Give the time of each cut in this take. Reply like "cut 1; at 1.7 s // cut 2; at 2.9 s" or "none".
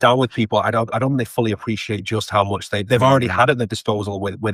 none